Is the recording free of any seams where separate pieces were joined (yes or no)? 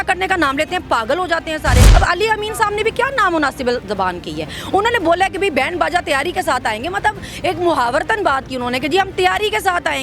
no